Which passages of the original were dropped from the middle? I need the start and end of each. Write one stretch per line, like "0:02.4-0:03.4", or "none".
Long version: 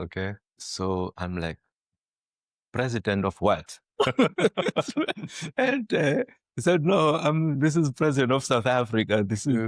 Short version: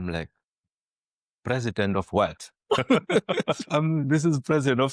0:04.9-0:07.2